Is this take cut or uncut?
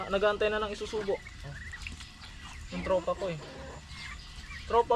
uncut